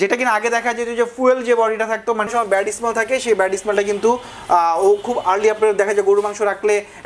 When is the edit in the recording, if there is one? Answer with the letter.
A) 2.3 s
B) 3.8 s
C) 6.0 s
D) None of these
A